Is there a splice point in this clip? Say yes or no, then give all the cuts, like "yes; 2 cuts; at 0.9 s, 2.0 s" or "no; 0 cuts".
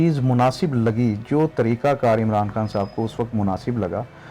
no; 0 cuts